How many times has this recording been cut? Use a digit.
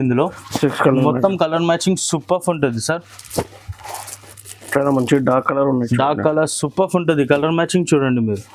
0